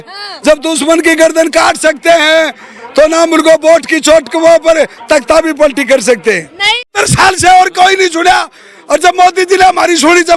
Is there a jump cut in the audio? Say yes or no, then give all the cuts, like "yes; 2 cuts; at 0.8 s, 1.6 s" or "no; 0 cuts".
yes; 1 cut; at 6.7 s